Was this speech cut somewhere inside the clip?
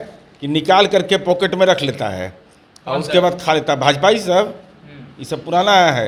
no; 0 cuts

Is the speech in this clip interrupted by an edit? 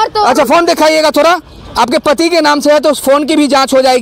no; 0 cuts

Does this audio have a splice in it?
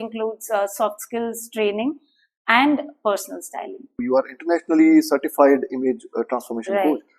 yes; 1 cut; at 4.0 s

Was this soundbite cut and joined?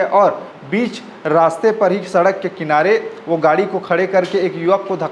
no; 0 cuts

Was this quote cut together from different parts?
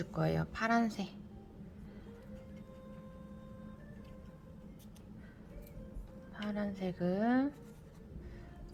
no; 0 cuts

